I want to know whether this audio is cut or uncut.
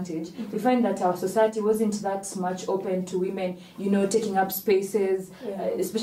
uncut